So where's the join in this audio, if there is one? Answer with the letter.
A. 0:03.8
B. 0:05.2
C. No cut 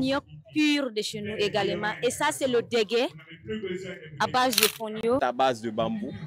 B